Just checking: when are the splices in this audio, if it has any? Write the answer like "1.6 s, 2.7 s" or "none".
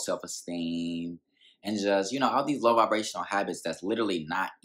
none

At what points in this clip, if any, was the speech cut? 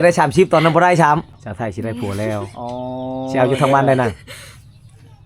1.4 s

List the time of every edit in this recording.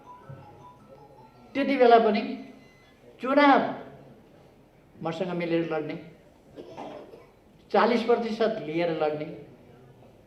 none

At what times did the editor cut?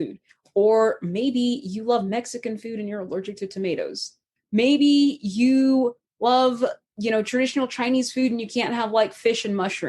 4.3 s

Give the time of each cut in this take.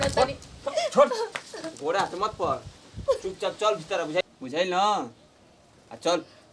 4.2 s

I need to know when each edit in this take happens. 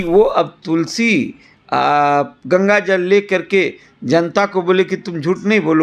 none

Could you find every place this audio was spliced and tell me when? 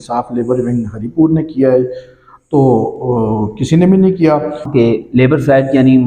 4.7 s

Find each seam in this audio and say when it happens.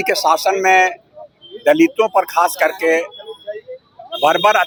none

